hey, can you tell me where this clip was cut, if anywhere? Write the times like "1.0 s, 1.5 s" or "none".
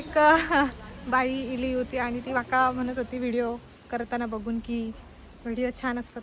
none